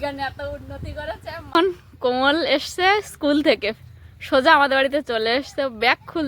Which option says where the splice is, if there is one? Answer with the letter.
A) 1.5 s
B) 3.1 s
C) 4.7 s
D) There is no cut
A